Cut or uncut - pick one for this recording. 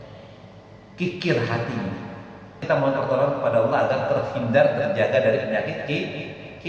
cut